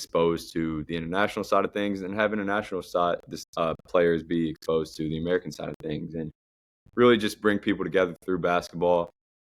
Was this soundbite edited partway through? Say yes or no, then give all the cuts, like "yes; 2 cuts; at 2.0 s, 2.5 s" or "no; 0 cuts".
no; 0 cuts